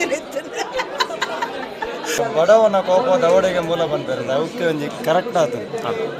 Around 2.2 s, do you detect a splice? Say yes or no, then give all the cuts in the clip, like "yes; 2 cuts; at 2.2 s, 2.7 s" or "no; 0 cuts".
yes; 1 cut; at 2.2 s